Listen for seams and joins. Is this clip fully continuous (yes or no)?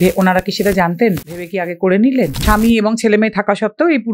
no